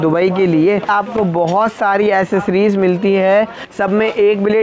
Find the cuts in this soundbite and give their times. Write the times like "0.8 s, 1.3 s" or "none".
0.9 s, 3.6 s